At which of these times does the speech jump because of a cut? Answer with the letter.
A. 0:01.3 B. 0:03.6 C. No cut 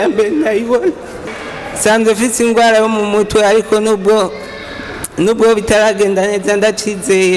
A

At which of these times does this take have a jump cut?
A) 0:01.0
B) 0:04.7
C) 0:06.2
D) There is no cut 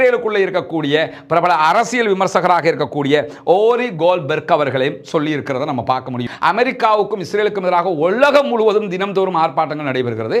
C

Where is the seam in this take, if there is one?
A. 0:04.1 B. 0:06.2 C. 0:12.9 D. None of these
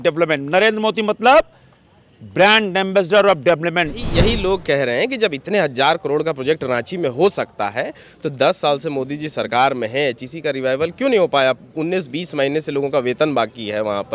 A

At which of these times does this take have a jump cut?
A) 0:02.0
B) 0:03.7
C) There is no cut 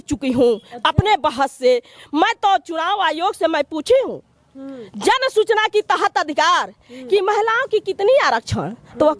A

